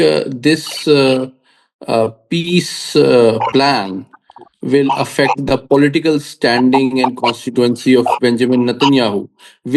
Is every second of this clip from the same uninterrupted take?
yes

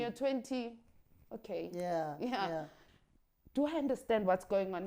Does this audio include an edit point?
yes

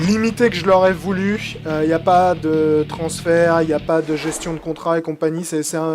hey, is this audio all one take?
yes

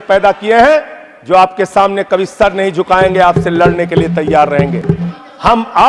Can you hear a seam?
yes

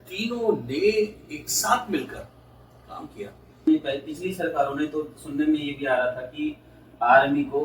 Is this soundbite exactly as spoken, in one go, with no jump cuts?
no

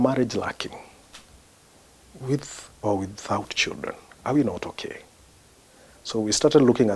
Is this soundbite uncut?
yes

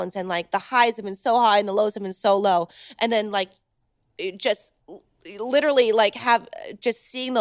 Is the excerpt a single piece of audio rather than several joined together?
yes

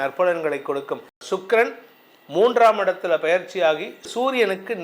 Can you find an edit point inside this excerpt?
yes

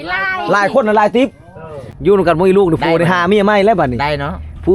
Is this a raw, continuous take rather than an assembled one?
no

